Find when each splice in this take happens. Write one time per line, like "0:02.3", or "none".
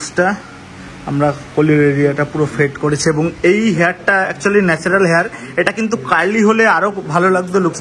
none